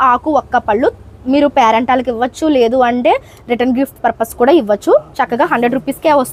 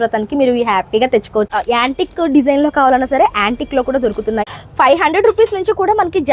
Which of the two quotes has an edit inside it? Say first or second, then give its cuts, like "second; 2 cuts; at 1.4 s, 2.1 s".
second; 2 cuts; at 1.5 s, 4.4 s